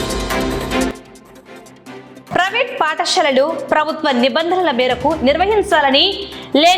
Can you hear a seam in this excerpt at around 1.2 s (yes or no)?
no